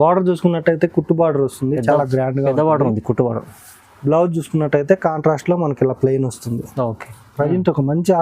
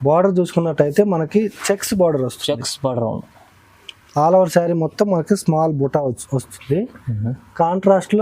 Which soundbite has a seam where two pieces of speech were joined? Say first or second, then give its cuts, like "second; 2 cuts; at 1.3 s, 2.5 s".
first; 1 cut; at 7.2 s